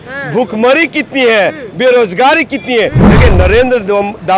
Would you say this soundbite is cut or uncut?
cut